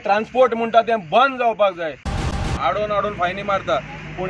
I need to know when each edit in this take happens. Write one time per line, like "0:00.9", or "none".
0:02.4